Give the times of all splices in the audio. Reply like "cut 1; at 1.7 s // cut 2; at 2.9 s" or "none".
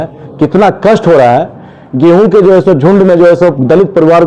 none